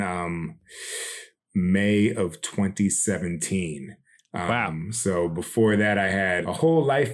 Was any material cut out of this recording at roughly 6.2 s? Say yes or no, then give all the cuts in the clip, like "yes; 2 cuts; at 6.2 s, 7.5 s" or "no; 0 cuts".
no; 1 cut; at 1.3 s